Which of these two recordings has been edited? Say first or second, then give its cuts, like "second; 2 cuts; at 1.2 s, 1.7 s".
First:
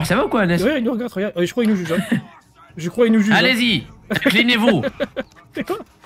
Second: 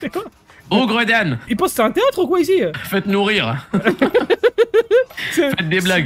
second; 2 cuts; at 1.5 s, 2.8 s